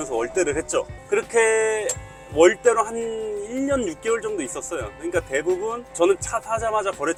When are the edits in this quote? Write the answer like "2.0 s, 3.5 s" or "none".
none